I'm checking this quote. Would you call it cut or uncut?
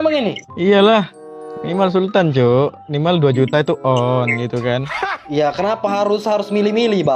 uncut